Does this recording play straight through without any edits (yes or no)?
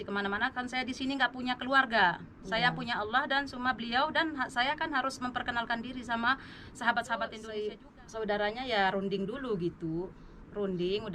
no